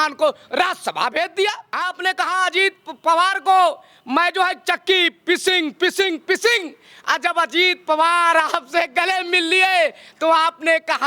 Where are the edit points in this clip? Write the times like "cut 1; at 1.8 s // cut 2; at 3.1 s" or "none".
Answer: cut 1; at 1.7 s